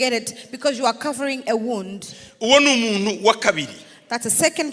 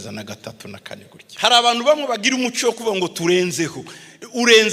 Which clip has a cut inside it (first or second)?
second